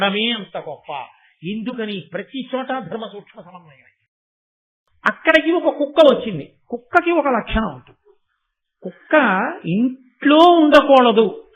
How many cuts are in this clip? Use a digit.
1